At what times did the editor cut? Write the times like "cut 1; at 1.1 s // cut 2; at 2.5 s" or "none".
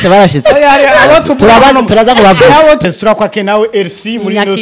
cut 1; at 2.8 s

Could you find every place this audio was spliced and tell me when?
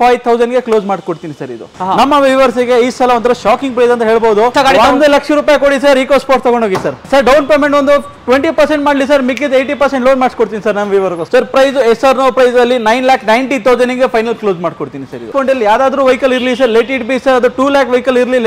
cut 1; at 1.8 s // cut 2; at 4.5 s // cut 3; at 7.0 s // cut 4; at 11.2 s // cut 5; at 15.3 s

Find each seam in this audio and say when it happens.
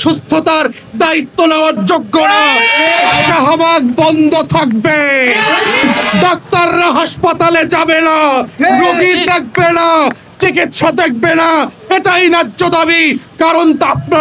cut 1; at 3.3 s // cut 2; at 6.0 s

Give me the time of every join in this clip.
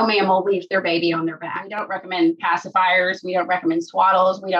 cut 1; at 1.7 s

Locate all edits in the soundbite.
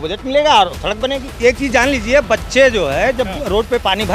cut 1; at 1.3 s

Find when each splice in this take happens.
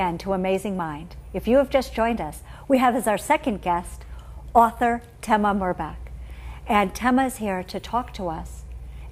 cut 1; at 1.7 s

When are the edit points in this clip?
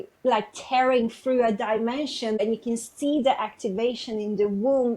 cut 1; at 2.4 s

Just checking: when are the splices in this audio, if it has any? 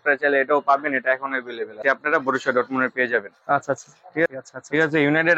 cut 1; at 1.8 s // cut 2; at 4.3 s

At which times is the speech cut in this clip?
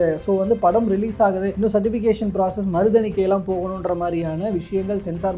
cut 1; at 1.5 s

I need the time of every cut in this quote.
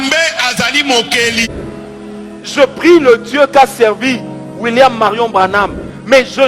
cut 1; at 1.5 s

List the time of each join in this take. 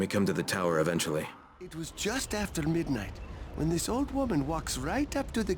cut 1; at 1.9 s

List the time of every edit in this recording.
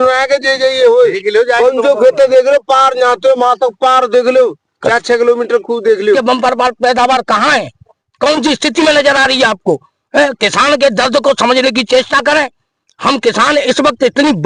cut 1; at 6.2 s

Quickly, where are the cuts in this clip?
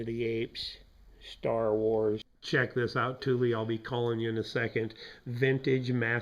cut 1; at 2.3 s

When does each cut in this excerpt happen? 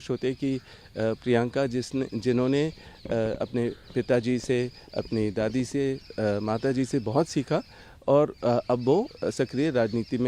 none

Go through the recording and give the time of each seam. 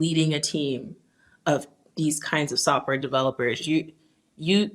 none

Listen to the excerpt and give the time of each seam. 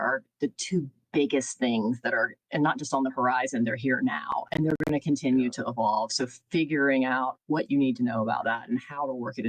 none

